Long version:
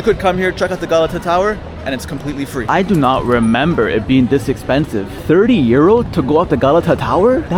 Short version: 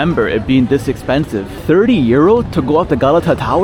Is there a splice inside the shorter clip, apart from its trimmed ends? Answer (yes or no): no